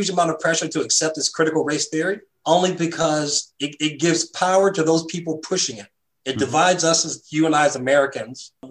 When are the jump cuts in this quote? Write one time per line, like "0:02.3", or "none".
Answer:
0:02.3